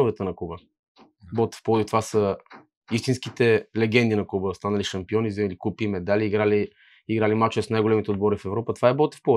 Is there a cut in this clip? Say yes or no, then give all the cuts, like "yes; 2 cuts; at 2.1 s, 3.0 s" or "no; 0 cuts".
no; 0 cuts